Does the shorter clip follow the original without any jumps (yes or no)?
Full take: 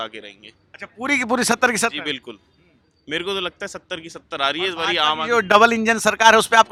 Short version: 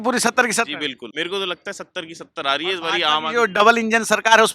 no